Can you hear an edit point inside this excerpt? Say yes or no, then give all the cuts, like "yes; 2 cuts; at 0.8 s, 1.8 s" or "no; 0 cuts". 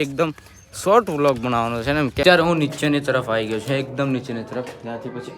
yes; 1 cut; at 2.2 s